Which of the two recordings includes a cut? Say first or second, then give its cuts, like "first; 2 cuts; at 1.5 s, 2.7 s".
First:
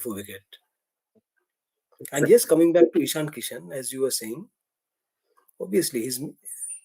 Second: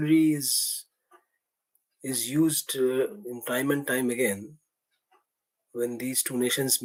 first; 1 cut; at 1.1 s